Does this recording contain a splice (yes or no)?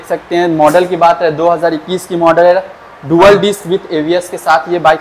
no